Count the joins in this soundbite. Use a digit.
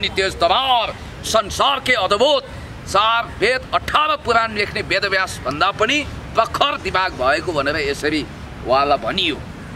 0